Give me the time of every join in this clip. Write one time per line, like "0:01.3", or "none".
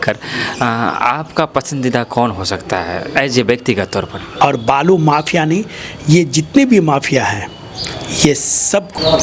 0:04.2

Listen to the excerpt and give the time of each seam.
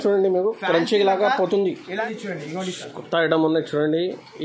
0:02.1

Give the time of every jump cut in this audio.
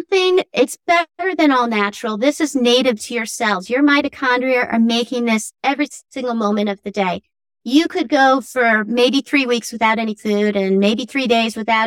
none

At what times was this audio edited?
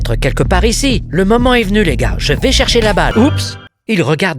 0:03.3

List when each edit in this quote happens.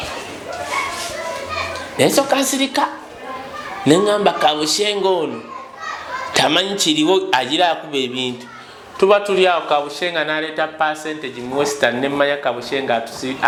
none

